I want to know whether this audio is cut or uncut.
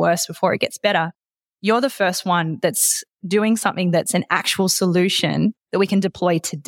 cut